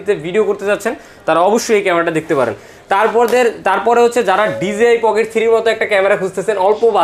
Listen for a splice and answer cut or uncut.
uncut